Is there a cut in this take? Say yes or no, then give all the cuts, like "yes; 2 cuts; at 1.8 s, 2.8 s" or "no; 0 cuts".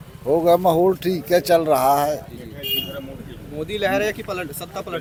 no; 0 cuts